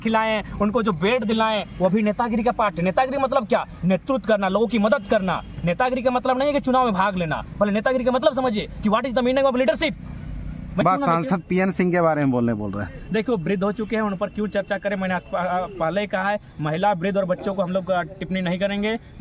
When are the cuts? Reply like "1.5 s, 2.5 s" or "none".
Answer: 10.8 s